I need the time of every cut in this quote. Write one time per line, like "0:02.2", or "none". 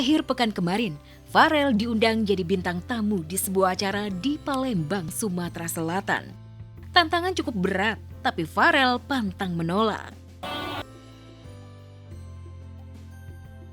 0:10.8